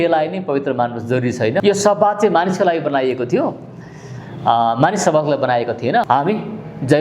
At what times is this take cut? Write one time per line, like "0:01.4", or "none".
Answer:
0:01.6
0:06.0